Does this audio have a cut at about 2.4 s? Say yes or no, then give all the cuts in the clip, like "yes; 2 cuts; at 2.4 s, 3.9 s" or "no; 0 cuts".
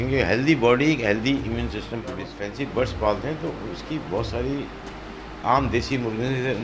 yes; 1 cut; at 2.4 s